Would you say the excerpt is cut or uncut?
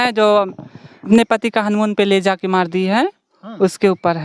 cut